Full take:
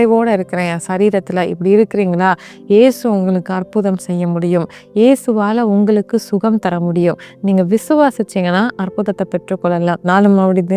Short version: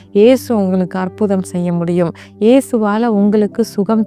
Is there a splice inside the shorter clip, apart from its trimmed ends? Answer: no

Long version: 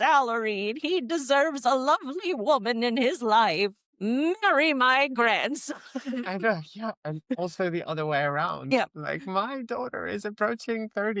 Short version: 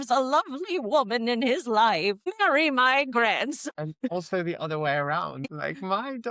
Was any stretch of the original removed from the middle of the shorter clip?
yes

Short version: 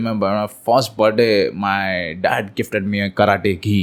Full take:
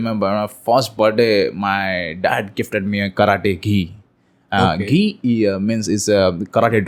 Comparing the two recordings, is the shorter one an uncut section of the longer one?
yes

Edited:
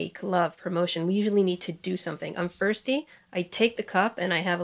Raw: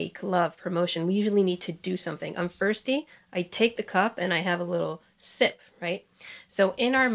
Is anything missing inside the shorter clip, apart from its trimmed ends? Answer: no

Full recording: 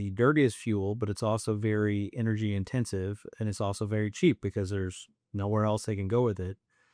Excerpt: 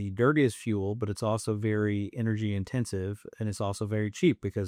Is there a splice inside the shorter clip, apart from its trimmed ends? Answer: no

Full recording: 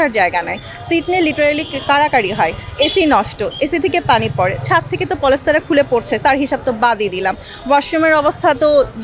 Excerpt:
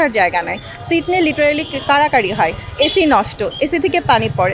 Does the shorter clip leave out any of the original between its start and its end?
no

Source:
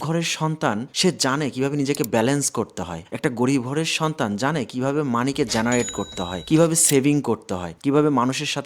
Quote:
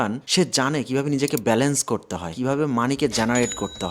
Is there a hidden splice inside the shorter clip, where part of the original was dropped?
yes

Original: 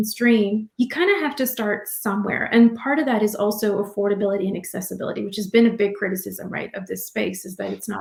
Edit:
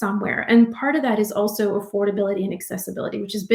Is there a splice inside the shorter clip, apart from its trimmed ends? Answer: no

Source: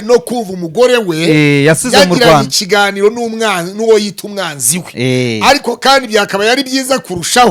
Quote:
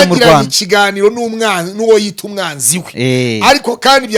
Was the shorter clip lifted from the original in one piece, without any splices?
yes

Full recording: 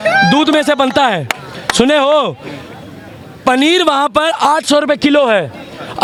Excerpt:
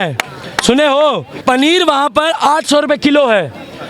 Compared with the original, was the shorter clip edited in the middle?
yes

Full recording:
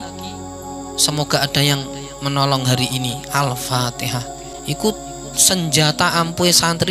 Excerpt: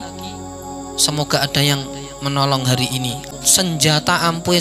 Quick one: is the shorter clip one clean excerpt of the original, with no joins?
no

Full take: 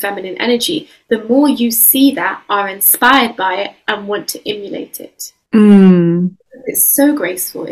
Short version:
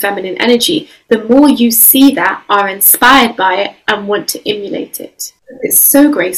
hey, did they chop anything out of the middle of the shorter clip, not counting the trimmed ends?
yes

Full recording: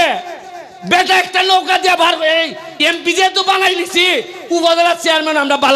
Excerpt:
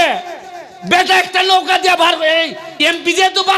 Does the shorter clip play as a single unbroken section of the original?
yes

